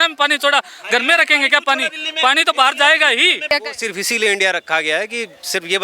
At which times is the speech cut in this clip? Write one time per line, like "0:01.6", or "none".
0:03.5